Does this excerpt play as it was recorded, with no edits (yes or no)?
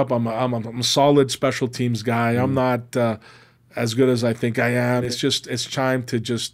no